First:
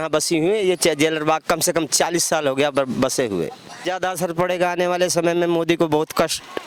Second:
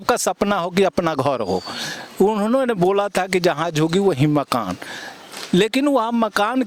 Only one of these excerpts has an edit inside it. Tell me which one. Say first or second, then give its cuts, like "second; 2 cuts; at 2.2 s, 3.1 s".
first; 1 cut; at 3.8 s